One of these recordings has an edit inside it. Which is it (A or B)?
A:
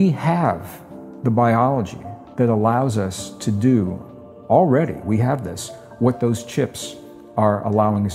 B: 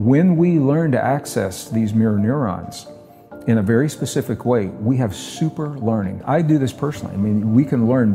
B